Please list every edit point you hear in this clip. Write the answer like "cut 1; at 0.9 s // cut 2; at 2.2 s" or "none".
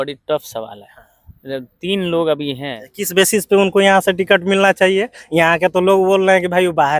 cut 1; at 2.8 s